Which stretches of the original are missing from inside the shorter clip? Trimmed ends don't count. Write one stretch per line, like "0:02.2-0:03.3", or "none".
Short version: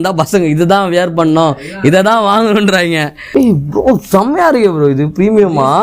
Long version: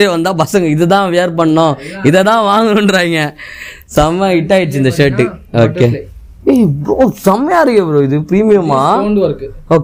0:03.4-0:06.3